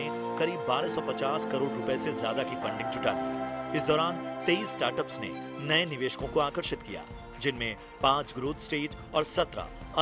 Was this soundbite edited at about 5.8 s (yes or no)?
no